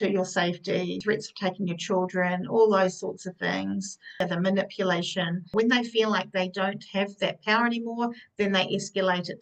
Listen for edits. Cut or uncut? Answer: cut